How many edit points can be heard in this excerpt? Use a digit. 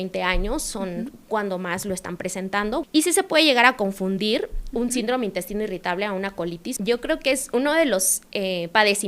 2